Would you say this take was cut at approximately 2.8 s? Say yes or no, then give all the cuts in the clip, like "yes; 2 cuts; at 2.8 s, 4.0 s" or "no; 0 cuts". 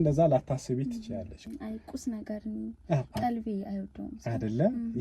no; 1 cut; at 1.4 s